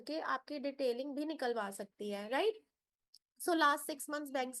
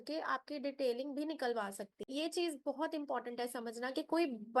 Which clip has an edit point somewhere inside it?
second; 1 cut; at 2.1 s

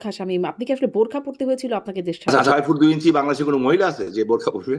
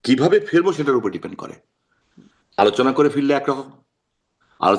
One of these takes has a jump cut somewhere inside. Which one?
first; 1 cut; at 2.3 s

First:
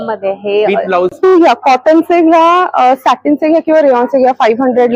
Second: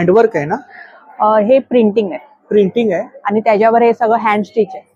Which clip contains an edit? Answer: first; 1 cut; at 1.3 s

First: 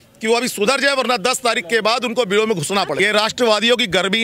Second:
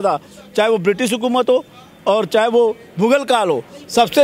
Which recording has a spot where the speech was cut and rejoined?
first; 1 cut; at 2.9 s

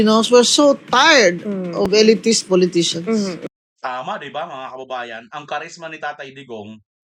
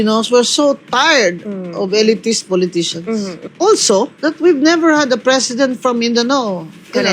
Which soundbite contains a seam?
second; 1 cut; at 3.4 s

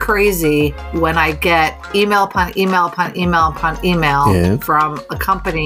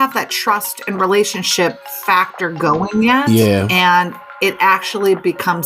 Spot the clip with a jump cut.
second; 1 cut; at 1.7 s

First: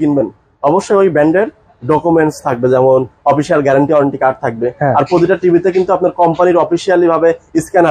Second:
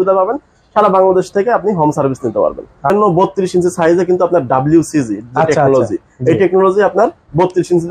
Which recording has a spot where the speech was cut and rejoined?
second; 1 cut; at 2.9 s

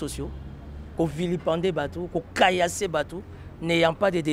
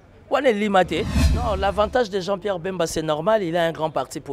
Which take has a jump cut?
second; 1 cut; at 1.3 s

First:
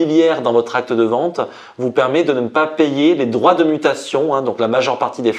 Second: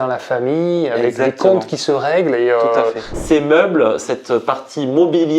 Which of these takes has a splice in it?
second; 2 cuts; at 3.1 s, 4.0 s

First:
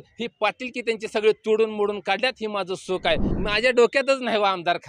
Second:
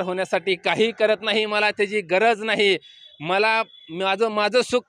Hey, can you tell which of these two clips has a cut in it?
first; 1 cut; at 3.3 s

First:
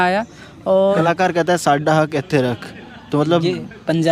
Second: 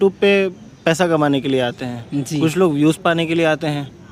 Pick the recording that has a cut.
first; 1 cut; at 1.0 s

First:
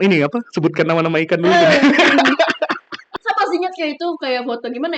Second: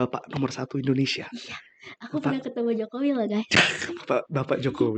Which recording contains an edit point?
first; 1 cut; at 3.1 s

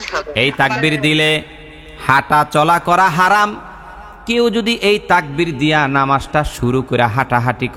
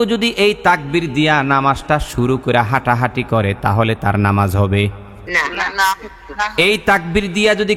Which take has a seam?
second; 1 cut; at 5.1 s

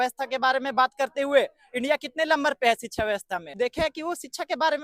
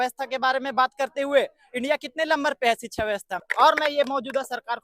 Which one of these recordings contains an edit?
second; 1 cut; at 3.4 s

